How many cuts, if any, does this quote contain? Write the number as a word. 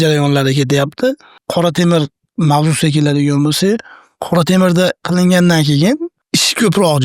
two